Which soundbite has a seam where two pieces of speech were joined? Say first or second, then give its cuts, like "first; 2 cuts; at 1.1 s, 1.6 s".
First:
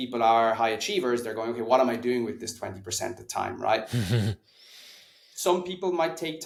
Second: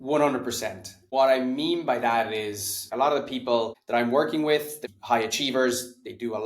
second; 4 cuts; at 0.9 s, 2.9 s, 3.8 s, 4.8 s